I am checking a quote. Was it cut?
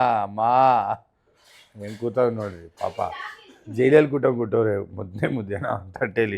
no; 0 cuts

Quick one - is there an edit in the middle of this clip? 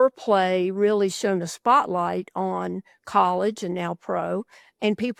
no; 0 cuts

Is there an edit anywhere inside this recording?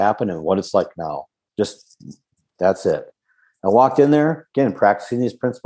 no; 0 cuts

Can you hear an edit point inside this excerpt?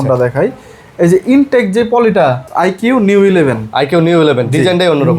yes; 1 cut; at 2.4 s

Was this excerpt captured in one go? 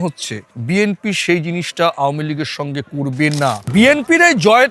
no; 1 cut; at 3.7 s

